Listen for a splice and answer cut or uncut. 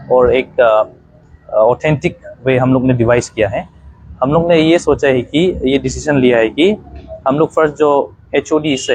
uncut